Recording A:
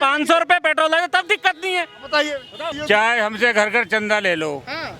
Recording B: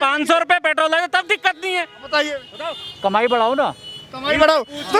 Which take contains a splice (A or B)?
A